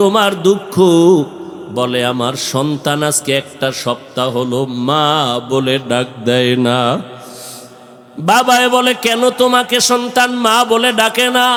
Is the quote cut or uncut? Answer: uncut